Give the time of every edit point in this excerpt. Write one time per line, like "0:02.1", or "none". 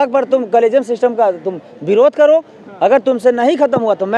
none

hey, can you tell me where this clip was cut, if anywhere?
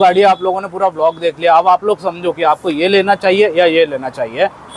none

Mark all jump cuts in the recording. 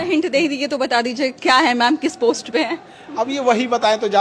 none

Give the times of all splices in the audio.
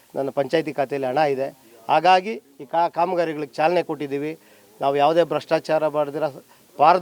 none

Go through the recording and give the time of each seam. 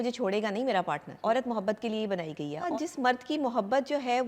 0:01.1
0:02.7

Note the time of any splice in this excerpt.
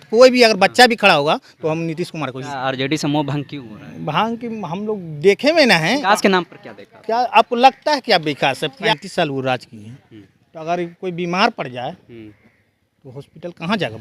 0:02.4
0:06.0
0:08.8

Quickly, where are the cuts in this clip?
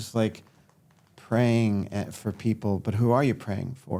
none

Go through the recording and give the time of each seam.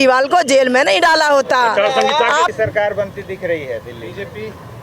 0:02.5

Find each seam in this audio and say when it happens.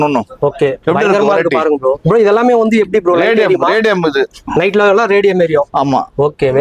none

